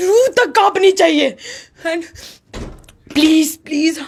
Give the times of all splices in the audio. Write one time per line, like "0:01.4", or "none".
none